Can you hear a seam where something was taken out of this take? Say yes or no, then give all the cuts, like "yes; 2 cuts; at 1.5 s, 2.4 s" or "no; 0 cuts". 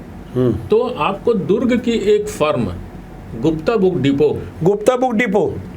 no; 0 cuts